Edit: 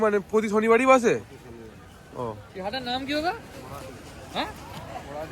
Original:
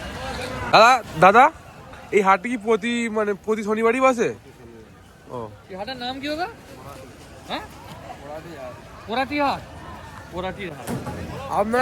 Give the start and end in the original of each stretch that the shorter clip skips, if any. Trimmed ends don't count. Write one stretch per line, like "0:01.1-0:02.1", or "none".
none